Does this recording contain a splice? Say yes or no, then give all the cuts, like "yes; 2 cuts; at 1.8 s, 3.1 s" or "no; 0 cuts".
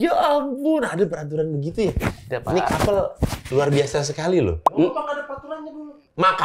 no; 0 cuts